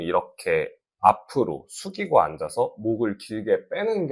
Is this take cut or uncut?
uncut